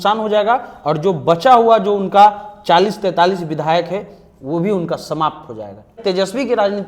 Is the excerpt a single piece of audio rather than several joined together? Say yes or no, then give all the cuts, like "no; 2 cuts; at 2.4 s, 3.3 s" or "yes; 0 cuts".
no; 1 cut; at 6.0 s